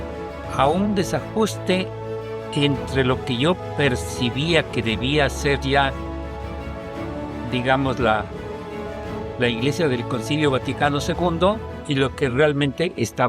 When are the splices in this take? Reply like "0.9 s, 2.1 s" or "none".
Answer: 11.7 s